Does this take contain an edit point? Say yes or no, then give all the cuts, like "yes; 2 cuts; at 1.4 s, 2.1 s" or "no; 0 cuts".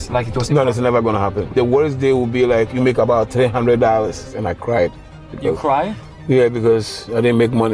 yes; 2 cuts; at 1.5 s, 4.3 s